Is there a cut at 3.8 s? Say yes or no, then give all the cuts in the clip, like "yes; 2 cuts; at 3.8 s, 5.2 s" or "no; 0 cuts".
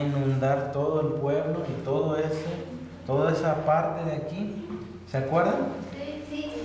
yes; 1 cut; at 3.8 s